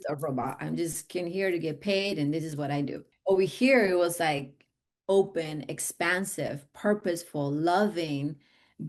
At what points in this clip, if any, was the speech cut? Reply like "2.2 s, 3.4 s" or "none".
3.1 s